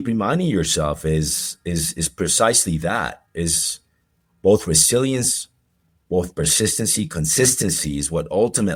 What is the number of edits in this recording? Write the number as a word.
zero